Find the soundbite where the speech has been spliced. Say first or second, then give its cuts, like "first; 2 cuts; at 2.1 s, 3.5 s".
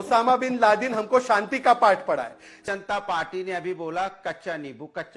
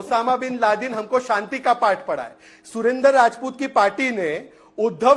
first; 1 cut; at 2.5 s